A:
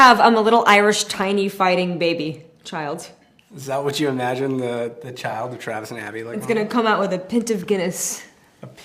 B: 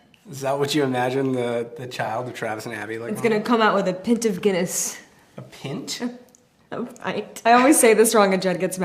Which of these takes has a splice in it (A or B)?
B